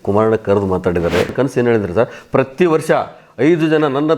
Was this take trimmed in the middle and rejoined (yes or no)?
yes